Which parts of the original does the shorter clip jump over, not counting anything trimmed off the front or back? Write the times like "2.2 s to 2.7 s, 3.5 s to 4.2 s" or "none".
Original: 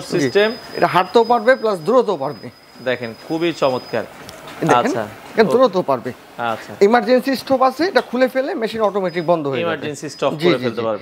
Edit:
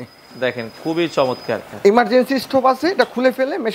4.1 s to 6.7 s